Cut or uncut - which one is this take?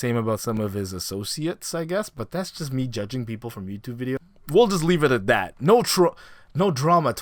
uncut